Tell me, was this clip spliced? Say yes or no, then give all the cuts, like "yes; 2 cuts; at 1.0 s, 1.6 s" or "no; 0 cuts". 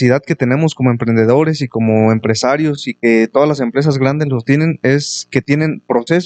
no; 0 cuts